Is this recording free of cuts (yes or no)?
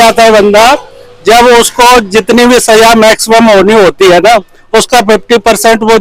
yes